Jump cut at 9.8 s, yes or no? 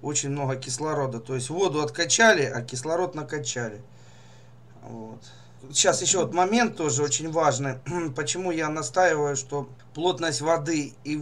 yes